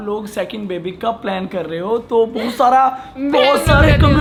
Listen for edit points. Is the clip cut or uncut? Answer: uncut